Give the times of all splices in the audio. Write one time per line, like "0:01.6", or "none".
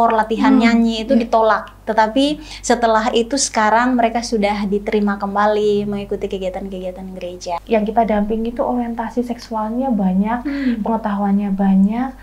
0:07.5